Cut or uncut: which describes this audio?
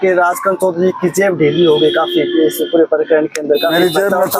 uncut